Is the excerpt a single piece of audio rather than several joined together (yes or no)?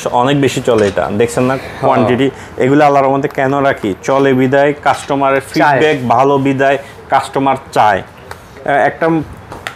yes